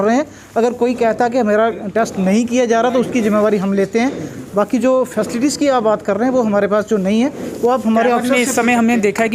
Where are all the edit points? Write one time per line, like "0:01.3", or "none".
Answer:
none